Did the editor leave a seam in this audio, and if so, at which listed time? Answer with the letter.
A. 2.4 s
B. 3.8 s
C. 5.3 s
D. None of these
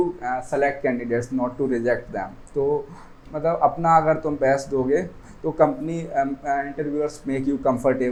D